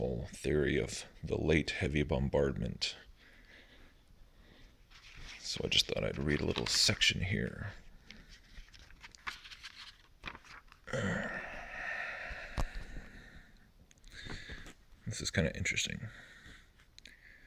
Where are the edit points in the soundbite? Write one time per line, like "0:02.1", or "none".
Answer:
0:09.8